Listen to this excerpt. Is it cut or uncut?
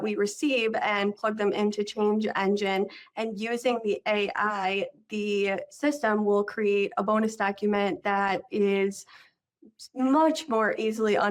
uncut